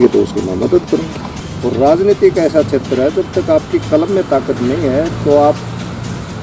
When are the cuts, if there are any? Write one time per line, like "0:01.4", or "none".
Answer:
0:01.2